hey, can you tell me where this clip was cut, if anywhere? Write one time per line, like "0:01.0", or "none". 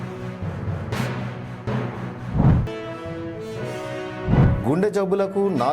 0:02.7